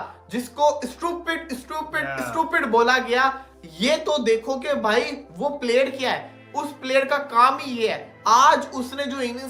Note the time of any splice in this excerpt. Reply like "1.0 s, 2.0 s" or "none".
none